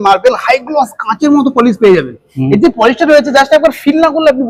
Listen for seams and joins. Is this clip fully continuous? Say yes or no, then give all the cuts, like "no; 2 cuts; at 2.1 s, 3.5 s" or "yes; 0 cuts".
yes; 0 cuts